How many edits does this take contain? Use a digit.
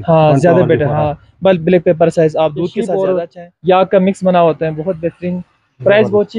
1